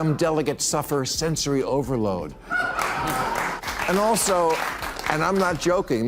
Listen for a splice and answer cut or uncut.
cut